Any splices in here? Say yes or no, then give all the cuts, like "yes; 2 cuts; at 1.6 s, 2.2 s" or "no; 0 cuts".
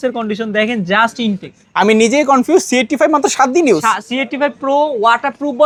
no; 0 cuts